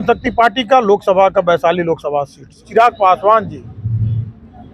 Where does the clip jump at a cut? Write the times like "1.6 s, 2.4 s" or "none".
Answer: 2.7 s